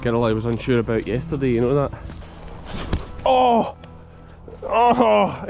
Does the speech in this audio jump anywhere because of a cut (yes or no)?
yes